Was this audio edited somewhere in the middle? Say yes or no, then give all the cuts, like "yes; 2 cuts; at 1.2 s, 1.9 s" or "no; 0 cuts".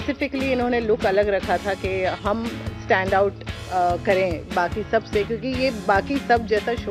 no; 0 cuts